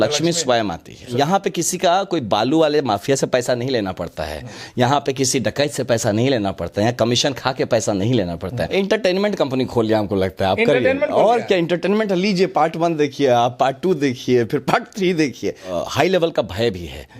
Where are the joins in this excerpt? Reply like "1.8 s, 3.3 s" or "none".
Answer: 1.1 s, 8.6 s, 15.7 s